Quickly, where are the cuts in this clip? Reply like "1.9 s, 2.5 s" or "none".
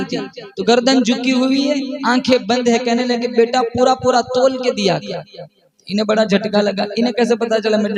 none